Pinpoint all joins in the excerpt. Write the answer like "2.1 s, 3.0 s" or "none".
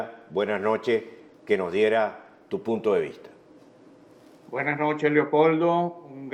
none